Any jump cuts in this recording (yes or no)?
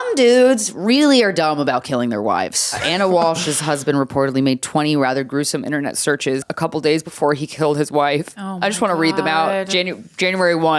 yes